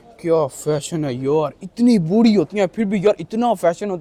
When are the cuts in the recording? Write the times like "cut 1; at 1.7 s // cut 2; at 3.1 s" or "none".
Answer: none